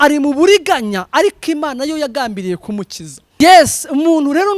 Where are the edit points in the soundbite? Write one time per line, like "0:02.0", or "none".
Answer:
0:03.4